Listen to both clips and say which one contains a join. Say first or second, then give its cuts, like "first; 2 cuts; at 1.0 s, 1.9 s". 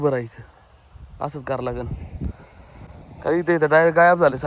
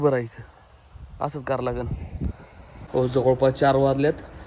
second; 1 cut; at 2.9 s